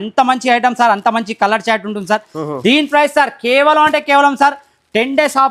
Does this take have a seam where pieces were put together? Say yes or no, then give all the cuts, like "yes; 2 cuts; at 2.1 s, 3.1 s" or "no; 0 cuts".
no; 0 cuts